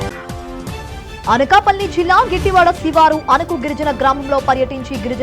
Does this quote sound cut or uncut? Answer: uncut